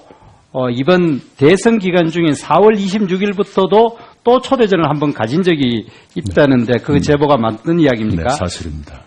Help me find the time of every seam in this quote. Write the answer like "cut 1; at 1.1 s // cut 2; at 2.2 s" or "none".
cut 1; at 3.7 s